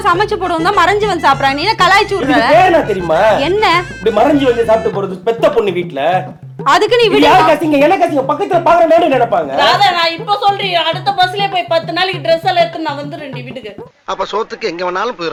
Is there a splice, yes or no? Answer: no